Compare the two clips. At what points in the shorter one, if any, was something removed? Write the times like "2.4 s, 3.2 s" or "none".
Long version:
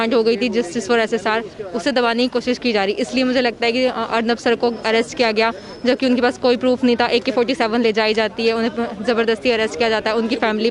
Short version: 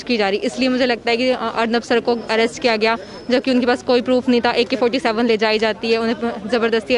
none